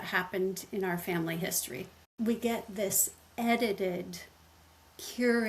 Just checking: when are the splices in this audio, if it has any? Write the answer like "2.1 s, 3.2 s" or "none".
2.0 s